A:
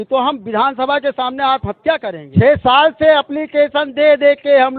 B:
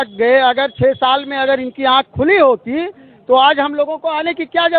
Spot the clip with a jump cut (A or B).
A